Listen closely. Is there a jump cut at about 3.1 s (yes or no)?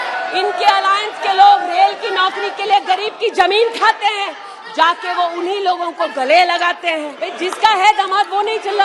no